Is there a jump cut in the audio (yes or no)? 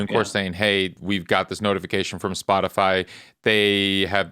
yes